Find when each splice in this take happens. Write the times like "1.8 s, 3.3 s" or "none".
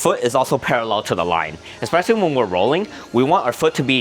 none